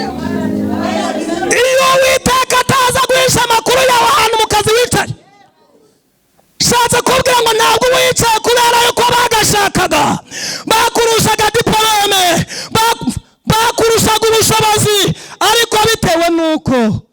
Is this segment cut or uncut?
uncut